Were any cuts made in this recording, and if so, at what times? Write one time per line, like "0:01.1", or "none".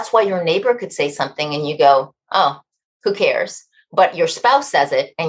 none